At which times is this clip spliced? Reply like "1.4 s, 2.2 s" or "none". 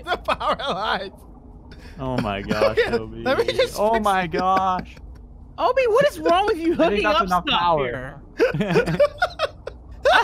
none